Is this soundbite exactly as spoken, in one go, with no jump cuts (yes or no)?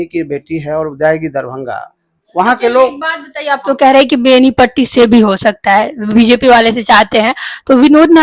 yes